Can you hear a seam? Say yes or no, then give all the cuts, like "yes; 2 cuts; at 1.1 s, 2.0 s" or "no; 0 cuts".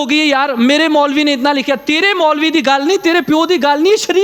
no; 0 cuts